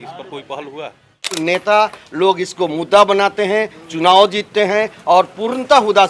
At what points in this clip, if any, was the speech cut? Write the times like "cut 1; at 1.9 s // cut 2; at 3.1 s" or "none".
cut 1; at 1.4 s